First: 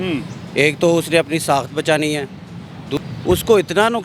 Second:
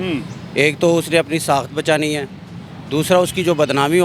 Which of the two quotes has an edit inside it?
first; 1 cut; at 3.0 s

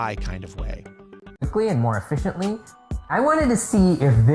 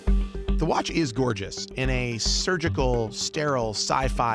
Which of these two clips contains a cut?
first; 1 cut; at 1.3 s

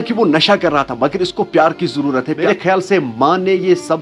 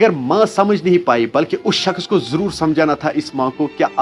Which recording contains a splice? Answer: first; 1 cut; at 2.4 s

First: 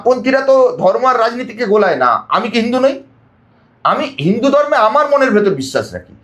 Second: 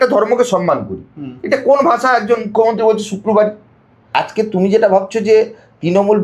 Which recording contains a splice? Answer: second; 1 cut; at 4.1 s

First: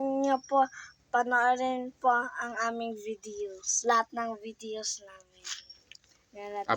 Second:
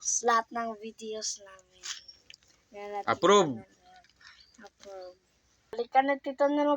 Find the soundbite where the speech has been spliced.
second; 1 cut; at 5.7 s

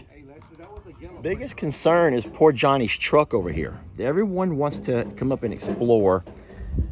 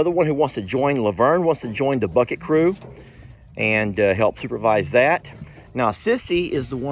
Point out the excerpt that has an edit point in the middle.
first; 1 cut; at 1.5 s

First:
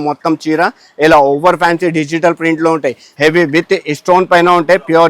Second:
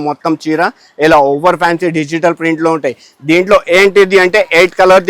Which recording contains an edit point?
first; 1 cut; at 3.0 s

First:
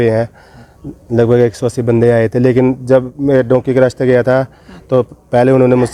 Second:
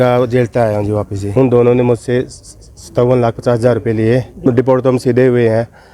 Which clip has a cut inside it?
second; 2 cuts; at 1.3 s, 4.4 s

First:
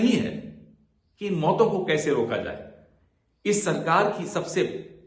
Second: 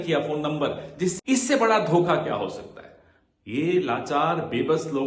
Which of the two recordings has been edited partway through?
second; 1 cut; at 1.1 s

